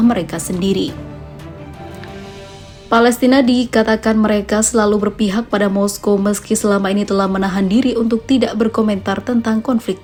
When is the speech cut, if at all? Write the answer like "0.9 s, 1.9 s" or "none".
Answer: none